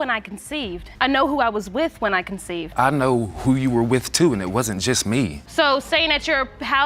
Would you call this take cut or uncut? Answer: uncut